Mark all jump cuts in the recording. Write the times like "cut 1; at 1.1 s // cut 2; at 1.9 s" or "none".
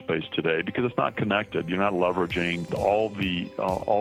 cut 1; at 2.7 s